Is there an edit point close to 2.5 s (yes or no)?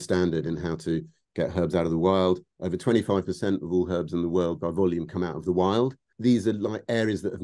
no